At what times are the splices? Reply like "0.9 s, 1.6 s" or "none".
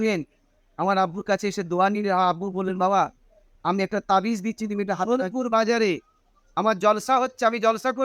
5.1 s